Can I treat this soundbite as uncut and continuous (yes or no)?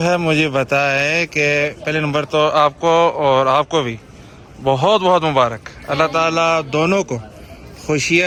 yes